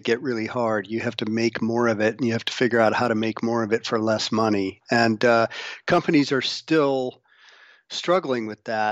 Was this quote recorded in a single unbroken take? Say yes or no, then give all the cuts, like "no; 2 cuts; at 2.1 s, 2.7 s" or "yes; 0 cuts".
yes; 0 cuts